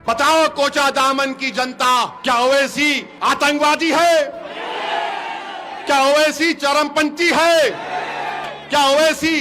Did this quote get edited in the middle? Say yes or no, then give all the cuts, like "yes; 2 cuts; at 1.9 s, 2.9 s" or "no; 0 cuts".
yes; 2 cuts; at 2.1 s, 3.1 s